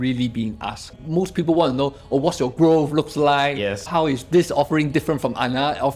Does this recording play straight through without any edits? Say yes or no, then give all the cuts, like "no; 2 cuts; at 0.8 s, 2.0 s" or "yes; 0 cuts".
yes; 0 cuts